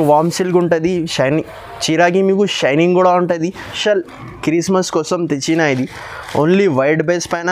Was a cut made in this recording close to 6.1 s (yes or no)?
no